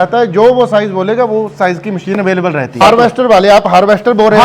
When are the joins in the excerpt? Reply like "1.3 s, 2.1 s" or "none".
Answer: 2.8 s